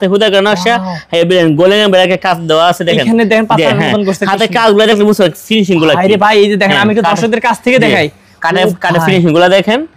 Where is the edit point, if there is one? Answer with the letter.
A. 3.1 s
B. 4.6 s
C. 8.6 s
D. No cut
D